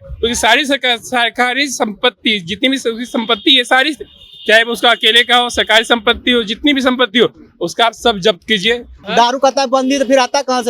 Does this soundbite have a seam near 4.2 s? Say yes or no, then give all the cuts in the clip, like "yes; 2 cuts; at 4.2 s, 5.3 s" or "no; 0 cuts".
no; 1 cut; at 9.0 s